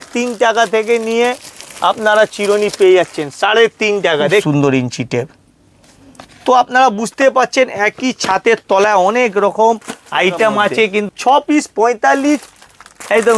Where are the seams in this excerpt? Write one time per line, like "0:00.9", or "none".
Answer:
0:04.4
0:11.1

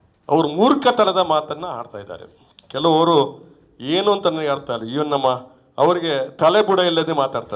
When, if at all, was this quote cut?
none

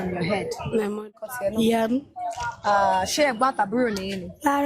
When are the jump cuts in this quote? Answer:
0:01.3

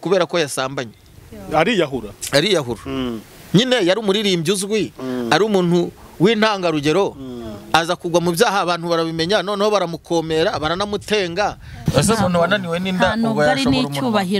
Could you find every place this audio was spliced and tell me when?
0:11.8

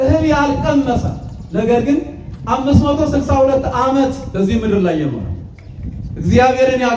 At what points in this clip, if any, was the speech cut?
none

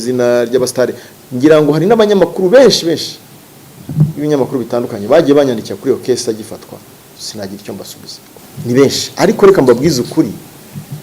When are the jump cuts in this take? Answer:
0:08.3

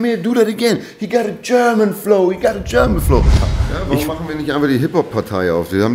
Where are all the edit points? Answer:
0:03.5

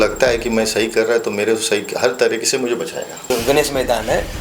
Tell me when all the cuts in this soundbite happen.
0:03.3

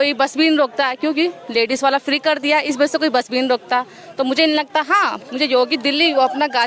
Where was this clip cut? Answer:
none

